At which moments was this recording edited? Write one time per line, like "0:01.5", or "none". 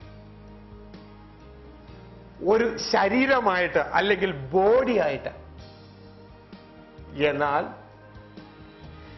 none